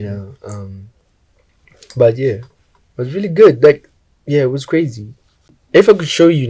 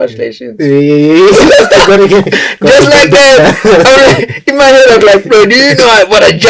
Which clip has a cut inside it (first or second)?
first